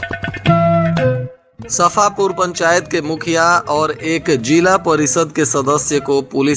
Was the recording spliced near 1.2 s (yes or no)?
yes